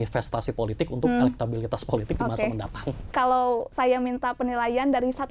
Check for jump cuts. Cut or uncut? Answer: cut